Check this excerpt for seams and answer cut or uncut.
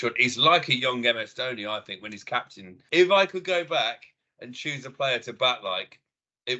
cut